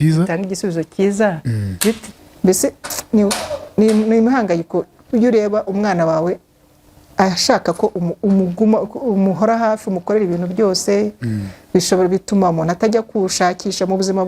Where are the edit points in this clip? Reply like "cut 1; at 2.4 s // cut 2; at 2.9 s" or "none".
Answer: cut 1; at 2.1 s